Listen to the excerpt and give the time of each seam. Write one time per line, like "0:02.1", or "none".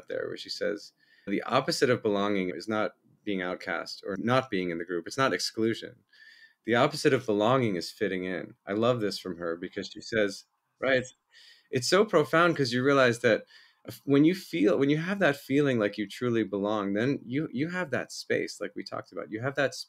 0:01.3
0:02.5
0:04.1